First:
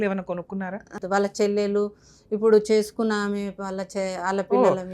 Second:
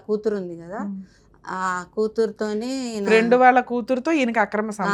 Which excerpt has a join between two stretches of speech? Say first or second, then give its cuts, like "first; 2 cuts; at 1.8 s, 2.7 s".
first; 1 cut; at 1.0 s